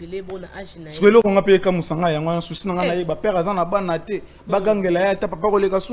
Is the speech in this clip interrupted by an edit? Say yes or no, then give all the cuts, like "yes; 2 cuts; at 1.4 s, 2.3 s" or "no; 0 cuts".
no; 0 cuts